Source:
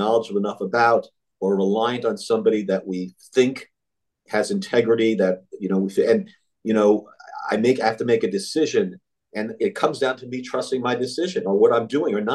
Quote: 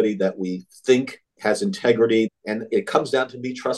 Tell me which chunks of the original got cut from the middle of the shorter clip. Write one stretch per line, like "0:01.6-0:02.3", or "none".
0:03.7-0:04.1
0:05.2-0:09.2